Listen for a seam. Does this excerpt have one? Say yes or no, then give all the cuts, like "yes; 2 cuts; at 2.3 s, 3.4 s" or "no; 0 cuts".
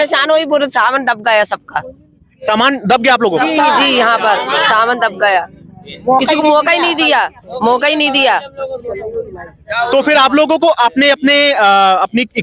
no; 0 cuts